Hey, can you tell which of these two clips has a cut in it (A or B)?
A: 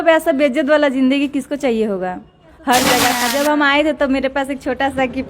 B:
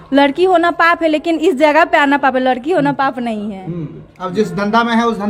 A